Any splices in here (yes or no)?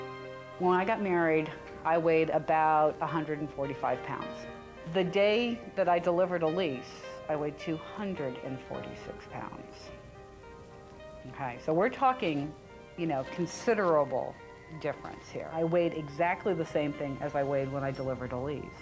no